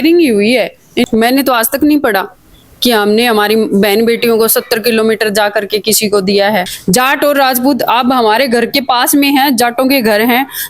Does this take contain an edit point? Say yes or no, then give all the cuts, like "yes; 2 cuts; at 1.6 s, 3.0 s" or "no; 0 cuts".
yes; 2 cuts; at 1.0 s, 6.7 s